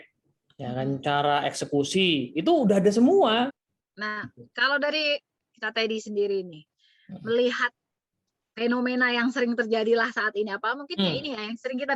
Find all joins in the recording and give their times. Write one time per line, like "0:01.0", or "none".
0:03.6